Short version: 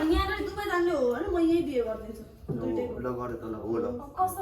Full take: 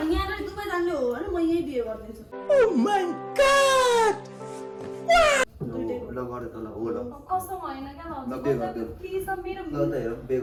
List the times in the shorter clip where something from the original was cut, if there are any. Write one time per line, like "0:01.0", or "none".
0:02.4

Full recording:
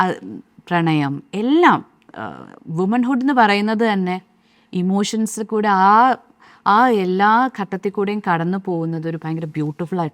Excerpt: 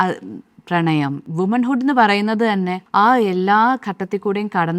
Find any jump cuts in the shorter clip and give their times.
0:01.2
0:02.8

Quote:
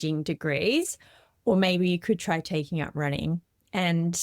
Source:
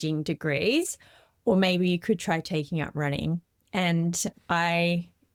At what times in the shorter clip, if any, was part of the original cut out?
none

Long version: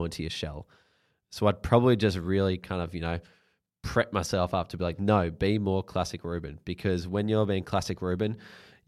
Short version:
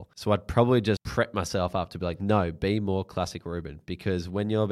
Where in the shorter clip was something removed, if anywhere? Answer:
0:01.0

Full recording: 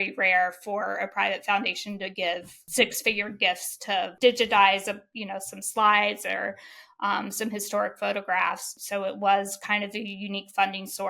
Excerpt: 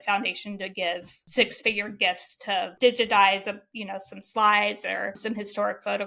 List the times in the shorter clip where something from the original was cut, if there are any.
0:05.2

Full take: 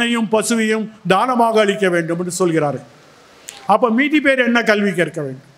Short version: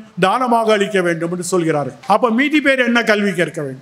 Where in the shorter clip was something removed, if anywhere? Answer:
0:01.9

